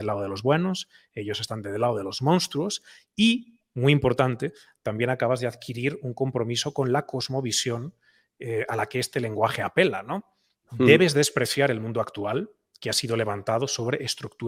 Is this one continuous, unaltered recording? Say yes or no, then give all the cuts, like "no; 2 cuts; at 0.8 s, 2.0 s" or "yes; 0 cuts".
yes; 0 cuts